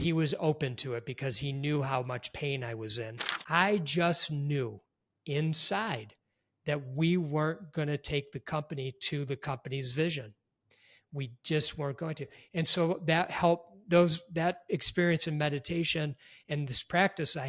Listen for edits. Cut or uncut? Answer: cut